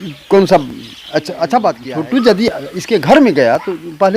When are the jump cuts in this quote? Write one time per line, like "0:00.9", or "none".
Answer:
0:01.9